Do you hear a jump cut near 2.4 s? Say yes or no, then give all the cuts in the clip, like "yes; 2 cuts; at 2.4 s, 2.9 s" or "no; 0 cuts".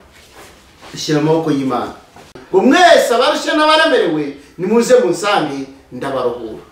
yes; 1 cut; at 2.4 s